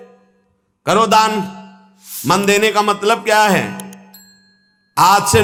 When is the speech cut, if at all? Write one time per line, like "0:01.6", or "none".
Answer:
none